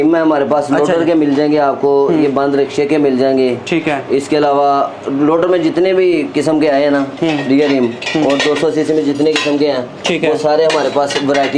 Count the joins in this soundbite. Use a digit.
0